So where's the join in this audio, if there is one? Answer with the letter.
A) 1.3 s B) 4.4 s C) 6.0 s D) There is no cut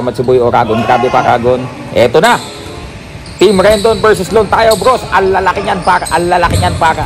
A